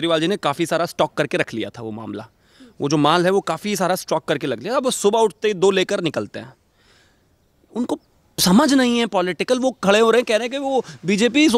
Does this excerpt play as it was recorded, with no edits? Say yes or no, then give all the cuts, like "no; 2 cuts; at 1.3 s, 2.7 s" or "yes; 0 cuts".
yes; 0 cuts